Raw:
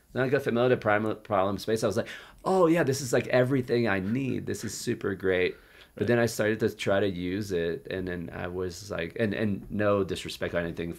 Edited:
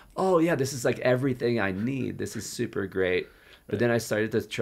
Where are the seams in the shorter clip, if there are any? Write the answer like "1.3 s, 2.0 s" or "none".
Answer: none